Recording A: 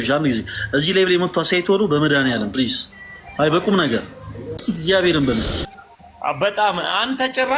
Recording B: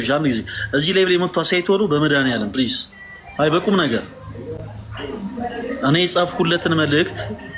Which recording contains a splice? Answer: A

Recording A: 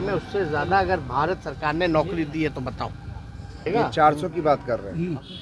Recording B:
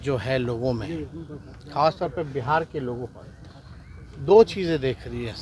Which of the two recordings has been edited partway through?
A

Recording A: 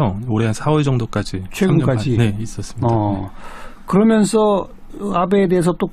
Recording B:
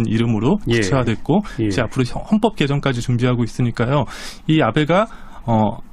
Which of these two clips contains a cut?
B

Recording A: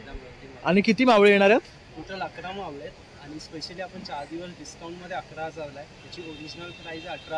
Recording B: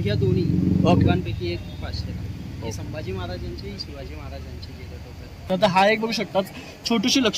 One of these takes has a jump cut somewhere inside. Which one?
B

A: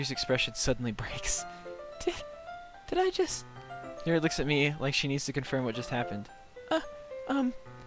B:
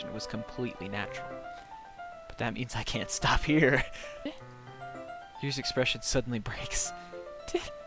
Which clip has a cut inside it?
B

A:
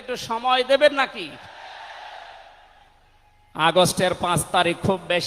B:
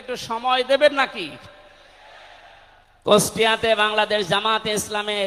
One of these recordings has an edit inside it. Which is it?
A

